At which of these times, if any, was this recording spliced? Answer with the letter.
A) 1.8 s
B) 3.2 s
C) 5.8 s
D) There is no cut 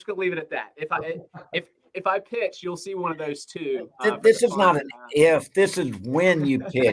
A